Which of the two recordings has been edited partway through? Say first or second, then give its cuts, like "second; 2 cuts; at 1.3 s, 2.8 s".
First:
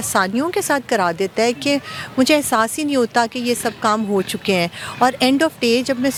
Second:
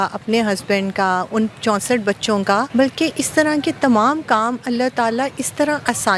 second; 1 cut; at 2.7 s